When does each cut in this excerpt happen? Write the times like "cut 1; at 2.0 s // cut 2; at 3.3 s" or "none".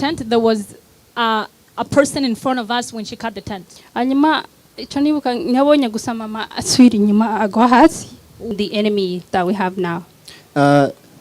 cut 1; at 8.5 s